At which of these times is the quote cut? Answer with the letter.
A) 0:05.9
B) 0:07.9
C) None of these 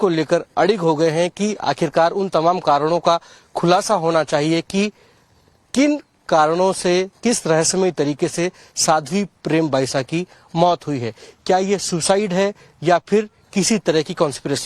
B